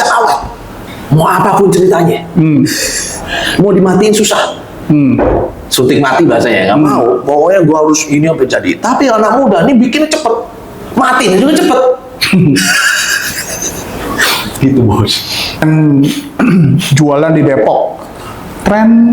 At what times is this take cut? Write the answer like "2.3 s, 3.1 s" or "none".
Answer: 15.6 s